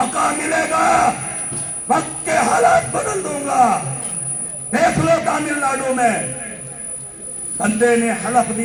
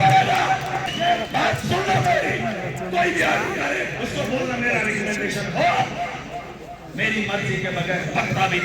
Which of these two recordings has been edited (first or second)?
second